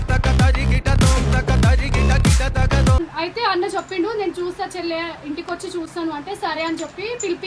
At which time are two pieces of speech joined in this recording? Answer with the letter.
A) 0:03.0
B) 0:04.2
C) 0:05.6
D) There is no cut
A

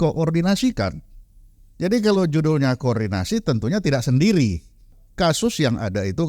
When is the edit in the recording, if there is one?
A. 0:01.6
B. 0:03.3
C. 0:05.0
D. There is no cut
C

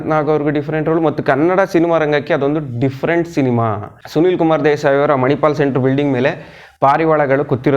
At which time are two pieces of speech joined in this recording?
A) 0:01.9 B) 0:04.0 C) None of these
B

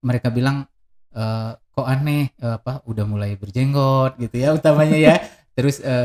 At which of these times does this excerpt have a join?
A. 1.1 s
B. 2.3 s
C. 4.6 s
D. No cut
D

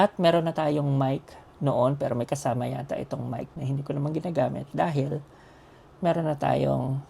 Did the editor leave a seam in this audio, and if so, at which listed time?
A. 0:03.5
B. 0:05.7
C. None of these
A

